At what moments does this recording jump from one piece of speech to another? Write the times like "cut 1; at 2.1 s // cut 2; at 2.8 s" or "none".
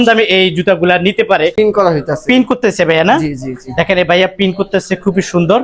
cut 1; at 1.5 s